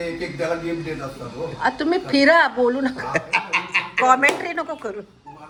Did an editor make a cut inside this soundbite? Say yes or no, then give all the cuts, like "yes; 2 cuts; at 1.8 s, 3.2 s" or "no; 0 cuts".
no; 0 cuts